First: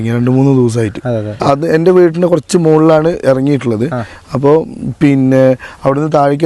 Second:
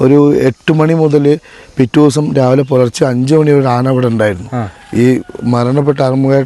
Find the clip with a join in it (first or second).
first